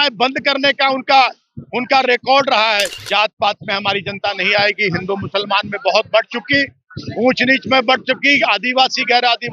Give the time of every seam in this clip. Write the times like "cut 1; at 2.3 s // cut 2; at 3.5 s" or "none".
cut 1; at 2.9 s